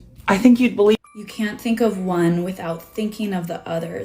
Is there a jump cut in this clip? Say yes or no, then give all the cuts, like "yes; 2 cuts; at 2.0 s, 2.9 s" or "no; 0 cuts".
yes; 1 cut; at 1.0 s